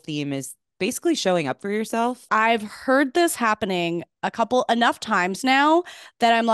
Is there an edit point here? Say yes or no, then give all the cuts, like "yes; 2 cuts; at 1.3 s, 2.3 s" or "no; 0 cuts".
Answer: yes; 1 cut; at 2.3 s